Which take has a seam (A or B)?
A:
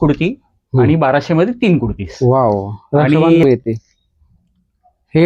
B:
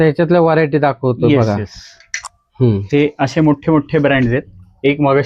A